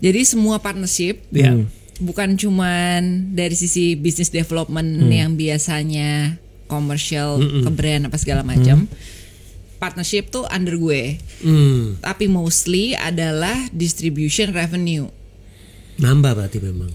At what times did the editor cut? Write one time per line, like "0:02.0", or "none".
none